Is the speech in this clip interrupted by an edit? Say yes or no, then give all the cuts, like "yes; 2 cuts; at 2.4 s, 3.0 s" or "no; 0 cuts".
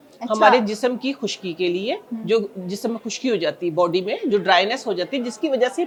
no; 0 cuts